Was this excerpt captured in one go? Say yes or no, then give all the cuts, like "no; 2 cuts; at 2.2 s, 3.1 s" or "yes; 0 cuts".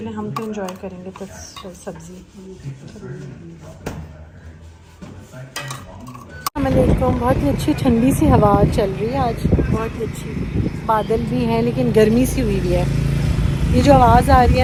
yes; 0 cuts